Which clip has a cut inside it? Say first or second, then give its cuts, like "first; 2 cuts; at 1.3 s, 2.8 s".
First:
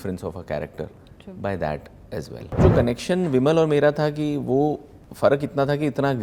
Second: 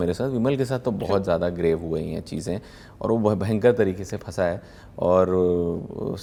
first; 2 cuts; at 2.6 s, 4.9 s